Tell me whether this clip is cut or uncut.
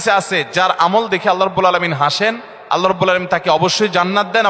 uncut